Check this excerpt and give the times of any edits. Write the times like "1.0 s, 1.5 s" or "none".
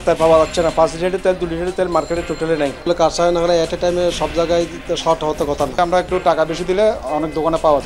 2.9 s, 5.8 s